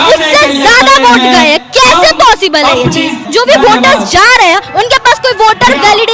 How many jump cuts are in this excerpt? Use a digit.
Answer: 1